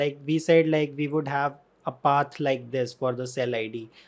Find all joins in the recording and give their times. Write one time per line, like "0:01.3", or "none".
none